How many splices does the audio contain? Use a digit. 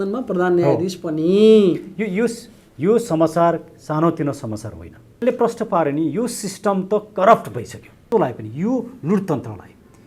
2